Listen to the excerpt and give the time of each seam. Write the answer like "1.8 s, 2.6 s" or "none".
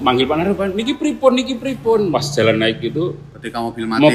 2.1 s